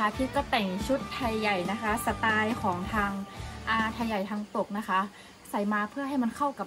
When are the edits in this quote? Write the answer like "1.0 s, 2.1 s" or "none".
none